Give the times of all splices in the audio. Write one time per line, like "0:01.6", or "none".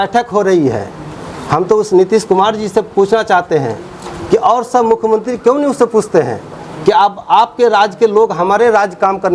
none